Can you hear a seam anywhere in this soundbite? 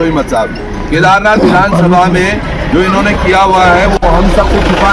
yes; 1 cut; at 4.0 s

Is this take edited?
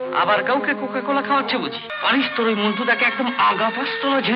yes; 1 cut; at 1.9 s

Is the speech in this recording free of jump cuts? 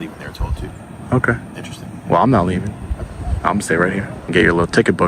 no; 1 cut; at 4.2 s

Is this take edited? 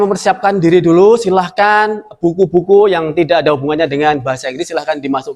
no; 0 cuts

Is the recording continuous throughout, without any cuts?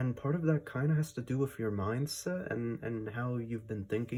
yes; 0 cuts

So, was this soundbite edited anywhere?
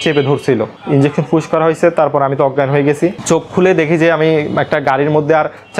yes; 1 cut; at 3.2 s

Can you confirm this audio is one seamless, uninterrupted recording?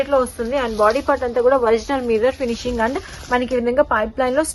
yes; 0 cuts

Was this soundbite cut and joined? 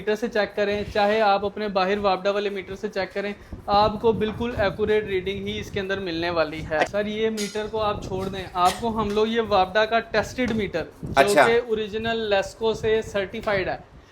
yes; 1 cut; at 6.9 s

